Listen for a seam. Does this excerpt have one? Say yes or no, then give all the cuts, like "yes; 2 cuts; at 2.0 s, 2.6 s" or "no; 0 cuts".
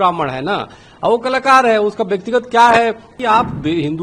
yes; 1 cut; at 3.1 s